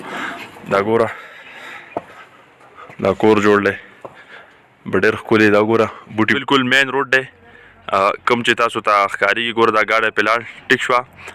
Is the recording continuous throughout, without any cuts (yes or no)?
no